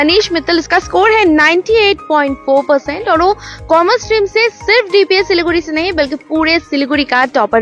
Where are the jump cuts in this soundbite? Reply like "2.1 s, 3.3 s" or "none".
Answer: none

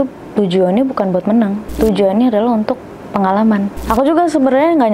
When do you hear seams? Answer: 1.8 s, 3.8 s

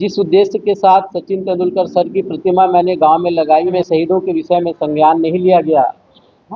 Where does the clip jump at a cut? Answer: 3.7 s

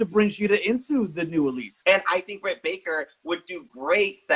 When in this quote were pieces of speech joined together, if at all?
1.7 s

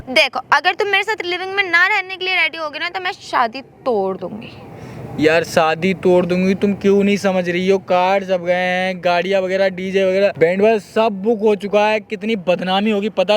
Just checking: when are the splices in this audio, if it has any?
10.3 s

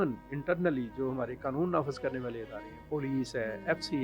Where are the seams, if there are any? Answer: none

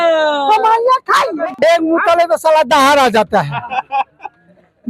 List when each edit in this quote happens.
1.4 s

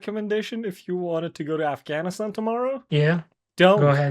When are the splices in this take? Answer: 2.8 s

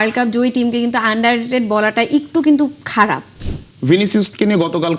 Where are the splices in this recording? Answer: 3.3 s

